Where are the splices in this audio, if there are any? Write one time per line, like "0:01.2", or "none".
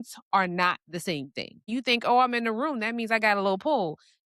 0:01.7